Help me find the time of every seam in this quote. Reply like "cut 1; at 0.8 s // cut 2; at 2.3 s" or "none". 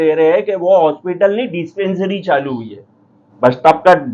cut 1; at 3.2 s